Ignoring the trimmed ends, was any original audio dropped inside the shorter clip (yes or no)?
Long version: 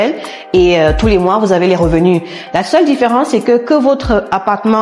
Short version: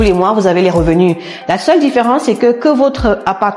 no